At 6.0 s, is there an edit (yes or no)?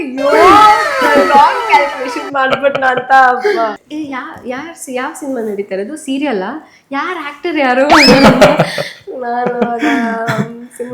no